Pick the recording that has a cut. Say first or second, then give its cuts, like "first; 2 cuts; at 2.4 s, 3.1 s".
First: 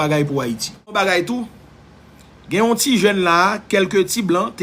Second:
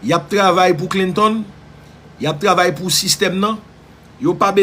first; 1 cut; at 0.9 s